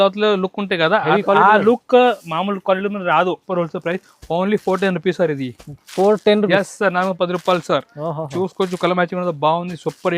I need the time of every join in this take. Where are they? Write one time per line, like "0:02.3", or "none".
0:03.4